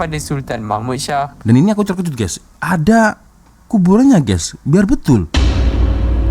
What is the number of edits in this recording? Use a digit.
1